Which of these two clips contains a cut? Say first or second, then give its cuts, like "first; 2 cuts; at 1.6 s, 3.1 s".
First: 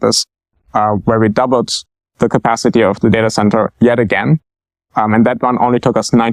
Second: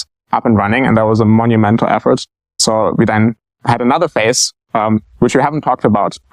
second; 2 cuts; at 2.6 s, 3.5 s